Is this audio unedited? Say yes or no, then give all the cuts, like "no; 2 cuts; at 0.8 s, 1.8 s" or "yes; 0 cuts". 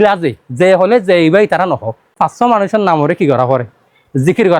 no; 1 cut; at 2.2 s